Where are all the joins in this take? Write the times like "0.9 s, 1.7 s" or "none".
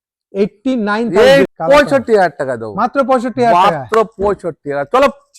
1.5 s